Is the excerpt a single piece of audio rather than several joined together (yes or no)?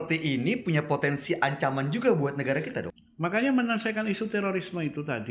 no